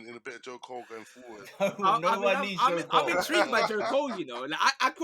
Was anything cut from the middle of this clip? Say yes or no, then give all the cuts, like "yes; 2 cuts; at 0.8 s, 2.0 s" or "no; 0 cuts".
no; 0 cuts